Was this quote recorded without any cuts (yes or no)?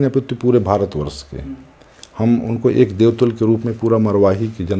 yes